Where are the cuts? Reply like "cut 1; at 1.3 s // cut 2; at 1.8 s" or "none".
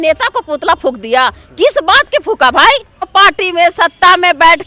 cut 1; at 3.1 s